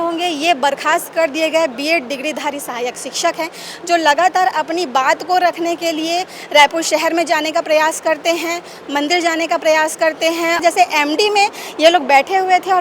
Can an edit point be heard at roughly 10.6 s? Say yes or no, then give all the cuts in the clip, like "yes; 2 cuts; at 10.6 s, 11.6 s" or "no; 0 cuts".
yes; 1 cut; at 10.6 s